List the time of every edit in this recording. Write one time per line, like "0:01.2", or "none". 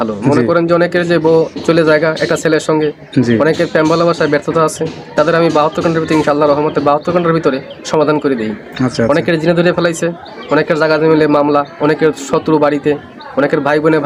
none